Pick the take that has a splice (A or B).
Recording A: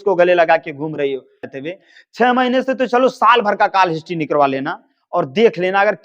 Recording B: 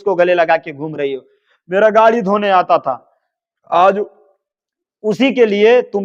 A